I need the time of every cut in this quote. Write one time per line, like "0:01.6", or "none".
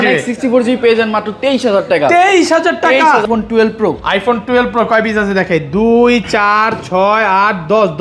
0:03.2